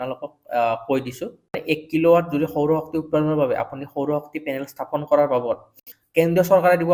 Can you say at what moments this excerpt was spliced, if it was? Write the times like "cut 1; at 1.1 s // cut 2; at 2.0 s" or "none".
cut 1; at 1.5 s